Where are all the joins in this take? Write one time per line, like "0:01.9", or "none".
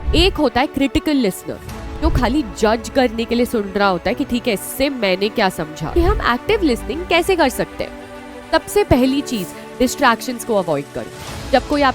0:05.9